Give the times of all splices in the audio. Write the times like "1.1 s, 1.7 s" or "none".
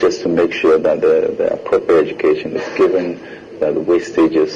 none